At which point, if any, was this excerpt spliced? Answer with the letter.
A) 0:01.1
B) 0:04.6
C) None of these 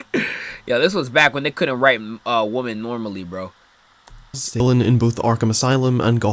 B